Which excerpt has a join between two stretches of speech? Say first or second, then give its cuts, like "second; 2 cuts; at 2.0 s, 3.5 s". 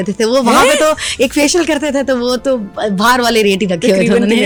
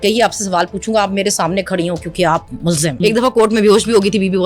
second; 1 cut; at 3.0 s